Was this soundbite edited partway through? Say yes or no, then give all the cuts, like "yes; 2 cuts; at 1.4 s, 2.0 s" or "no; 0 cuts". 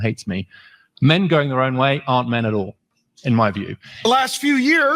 yes; 1 cut; at 4.1 s